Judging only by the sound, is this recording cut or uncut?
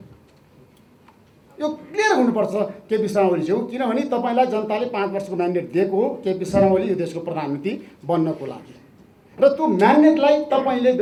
uncut